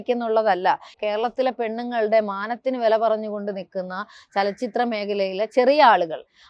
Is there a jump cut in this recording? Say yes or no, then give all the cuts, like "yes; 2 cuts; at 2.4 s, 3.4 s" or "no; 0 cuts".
yes; 1 cut; at 0.9 s